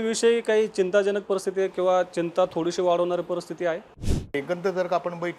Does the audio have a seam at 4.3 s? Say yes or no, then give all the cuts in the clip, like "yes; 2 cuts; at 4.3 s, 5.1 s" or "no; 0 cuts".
yes; 1 cut; at 4.3 s